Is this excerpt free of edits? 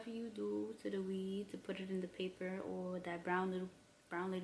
yes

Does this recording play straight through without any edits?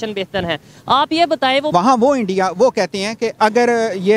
no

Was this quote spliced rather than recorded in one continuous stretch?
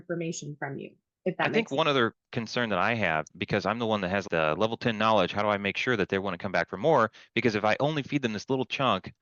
no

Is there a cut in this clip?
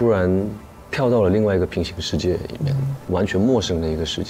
yes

